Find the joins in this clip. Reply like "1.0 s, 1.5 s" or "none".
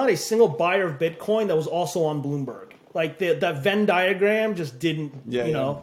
none